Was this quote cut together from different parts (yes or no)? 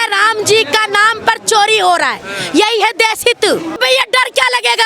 yes